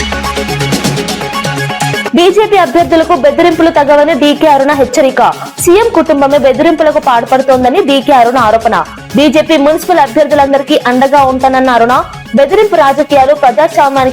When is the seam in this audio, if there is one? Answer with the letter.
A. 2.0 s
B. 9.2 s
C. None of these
A